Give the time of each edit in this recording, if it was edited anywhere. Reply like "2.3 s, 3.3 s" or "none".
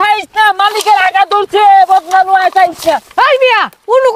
none